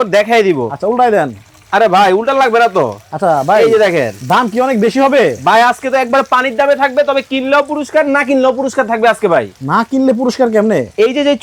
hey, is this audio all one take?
yes; 0 cuts

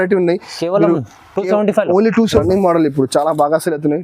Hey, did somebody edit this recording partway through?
yes; 1 cut; at 2.4 s

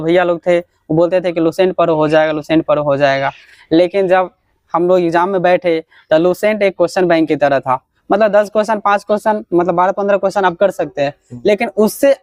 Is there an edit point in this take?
no; 0 cuts

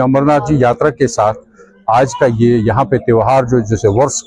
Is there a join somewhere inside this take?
no; 0 cuts

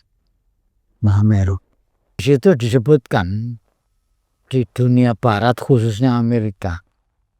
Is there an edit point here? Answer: yes; 1 cut; at 2.2 s

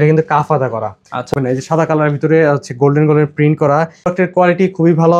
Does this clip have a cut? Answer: yes; 2 cuts; at 1.3 s, 4.1 s

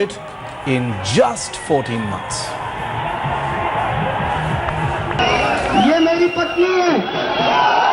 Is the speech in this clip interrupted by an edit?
no; 0 cuts

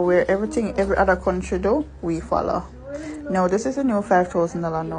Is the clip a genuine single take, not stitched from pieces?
yes; 0 cuts

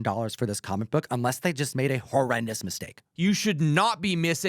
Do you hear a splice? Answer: yes; 1 cut; at 3.0 s

